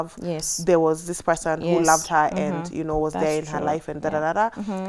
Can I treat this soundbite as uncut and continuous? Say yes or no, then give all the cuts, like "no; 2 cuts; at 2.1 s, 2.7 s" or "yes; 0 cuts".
yes; 0 cuts